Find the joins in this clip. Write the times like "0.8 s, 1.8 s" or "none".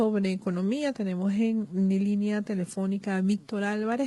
none

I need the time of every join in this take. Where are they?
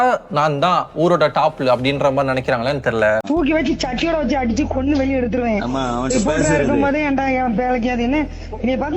3.2 s

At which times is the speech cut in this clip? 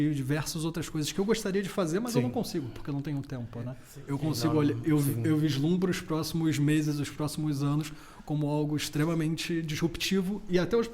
3.8 s

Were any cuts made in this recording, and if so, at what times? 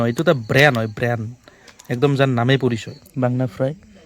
3.0 s

